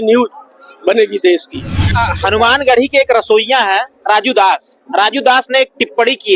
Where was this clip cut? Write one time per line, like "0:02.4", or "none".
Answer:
0:02.0